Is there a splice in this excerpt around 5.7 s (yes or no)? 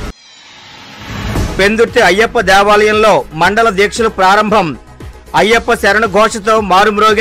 no